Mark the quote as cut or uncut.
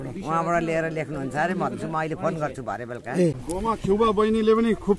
cut